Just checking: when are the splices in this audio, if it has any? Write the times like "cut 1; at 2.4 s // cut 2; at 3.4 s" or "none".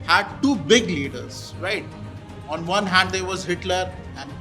none